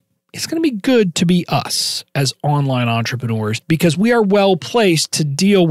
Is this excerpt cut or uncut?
cut